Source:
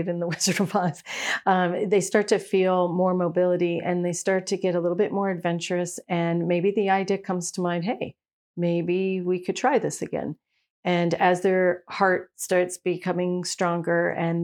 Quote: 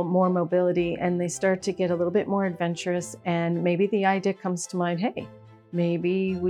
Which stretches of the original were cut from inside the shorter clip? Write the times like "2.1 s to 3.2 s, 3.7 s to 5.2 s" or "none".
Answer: none